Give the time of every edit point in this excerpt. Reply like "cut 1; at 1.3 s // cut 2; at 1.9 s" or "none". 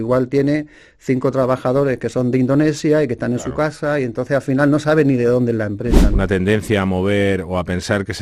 cut 1; at 6.1 s